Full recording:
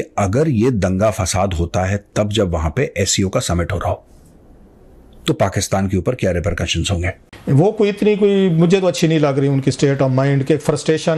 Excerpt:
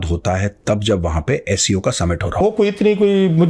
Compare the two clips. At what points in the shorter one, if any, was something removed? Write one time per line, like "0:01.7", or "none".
0:02.4